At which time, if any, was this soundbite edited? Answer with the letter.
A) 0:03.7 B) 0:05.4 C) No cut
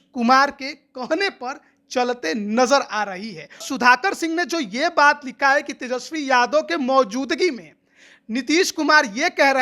A